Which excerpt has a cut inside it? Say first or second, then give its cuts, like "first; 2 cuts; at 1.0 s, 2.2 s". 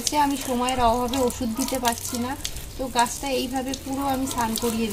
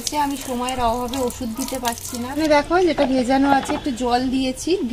second; 1 cut; at 2.4 s